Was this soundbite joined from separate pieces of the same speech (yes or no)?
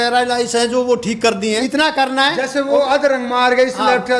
no